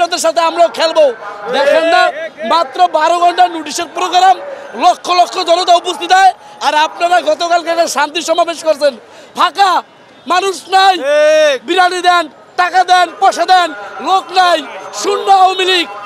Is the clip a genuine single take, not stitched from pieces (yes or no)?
yes